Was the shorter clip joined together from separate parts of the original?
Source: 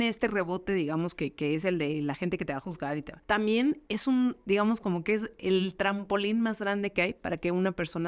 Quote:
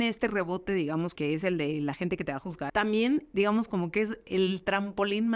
yes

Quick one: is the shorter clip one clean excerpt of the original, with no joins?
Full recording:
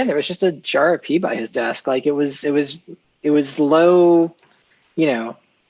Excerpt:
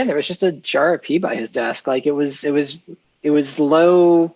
yes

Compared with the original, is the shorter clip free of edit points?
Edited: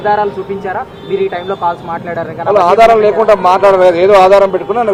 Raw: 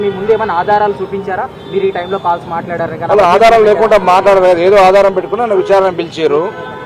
yes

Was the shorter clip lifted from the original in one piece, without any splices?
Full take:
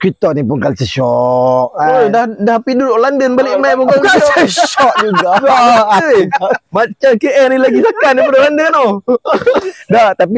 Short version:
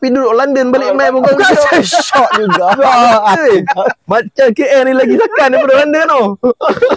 yes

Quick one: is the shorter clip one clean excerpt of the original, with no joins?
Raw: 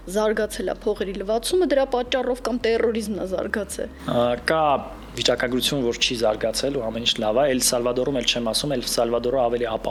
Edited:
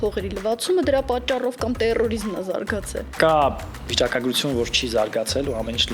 no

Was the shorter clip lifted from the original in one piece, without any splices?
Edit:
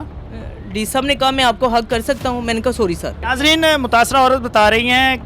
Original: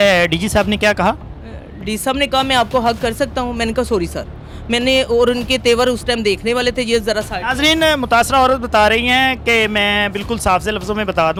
no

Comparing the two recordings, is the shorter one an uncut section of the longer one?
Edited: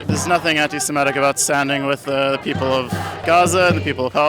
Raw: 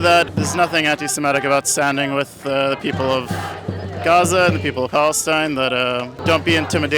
no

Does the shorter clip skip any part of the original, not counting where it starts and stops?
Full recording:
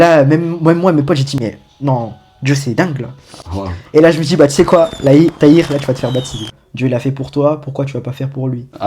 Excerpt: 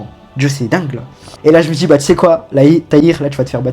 yes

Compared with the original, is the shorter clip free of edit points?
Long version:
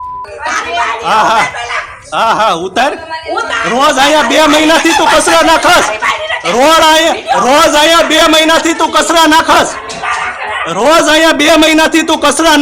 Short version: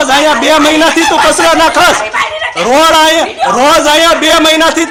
yes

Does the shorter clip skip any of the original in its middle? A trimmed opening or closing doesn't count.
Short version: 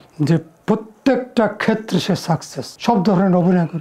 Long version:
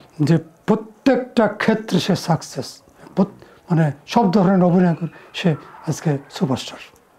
yes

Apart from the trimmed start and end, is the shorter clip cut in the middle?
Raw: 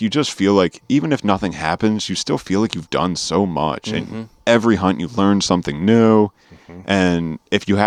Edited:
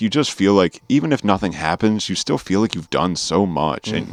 no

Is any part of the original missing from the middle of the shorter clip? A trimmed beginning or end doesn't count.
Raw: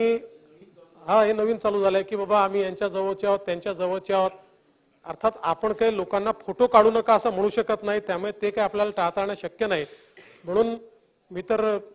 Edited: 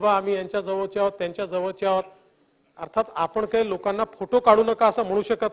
no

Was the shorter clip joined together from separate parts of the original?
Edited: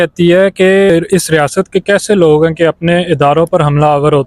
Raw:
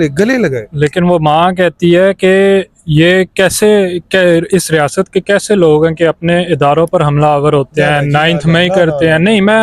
yes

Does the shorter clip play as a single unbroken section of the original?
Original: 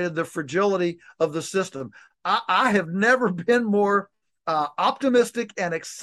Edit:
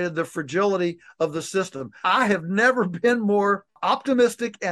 no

